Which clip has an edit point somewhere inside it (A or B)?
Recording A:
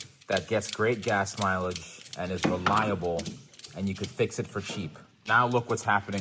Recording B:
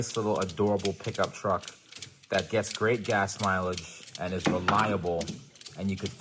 A